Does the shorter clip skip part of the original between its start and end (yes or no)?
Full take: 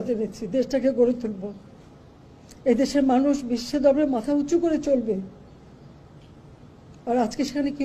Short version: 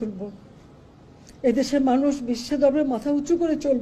no